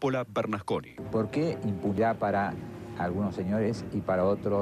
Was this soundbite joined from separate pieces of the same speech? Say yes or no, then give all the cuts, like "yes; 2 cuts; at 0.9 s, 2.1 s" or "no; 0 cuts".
yes; 1 cut; at 2.0 s